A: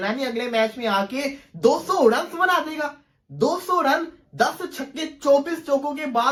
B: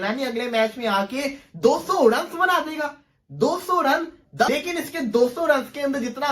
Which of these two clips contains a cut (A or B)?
B